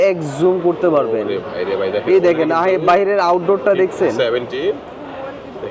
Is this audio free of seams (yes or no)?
yes